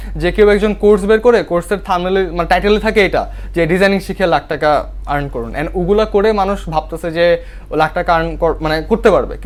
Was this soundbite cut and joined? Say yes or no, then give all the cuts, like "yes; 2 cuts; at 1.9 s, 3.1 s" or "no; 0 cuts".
no; 0 cuts